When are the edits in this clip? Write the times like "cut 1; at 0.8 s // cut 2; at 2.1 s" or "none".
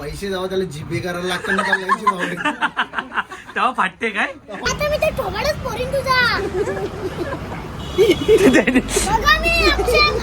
cut 1; at 4.6 s

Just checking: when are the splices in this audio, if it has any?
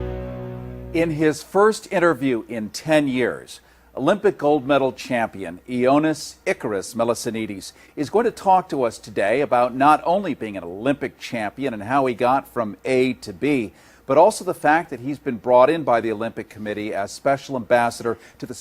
cut 1; at 9.0 s

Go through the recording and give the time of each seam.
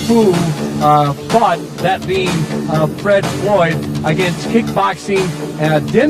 none

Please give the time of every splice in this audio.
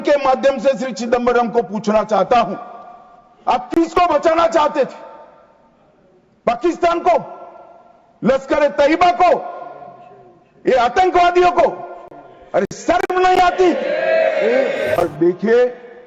cut 1; at 15.0 s

